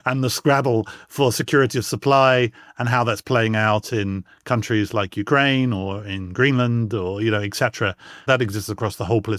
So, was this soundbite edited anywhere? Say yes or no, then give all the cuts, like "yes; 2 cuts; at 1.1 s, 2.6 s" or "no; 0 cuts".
no; 0 cuts